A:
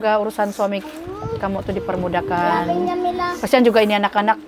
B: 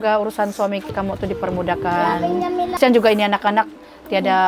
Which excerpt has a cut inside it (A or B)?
B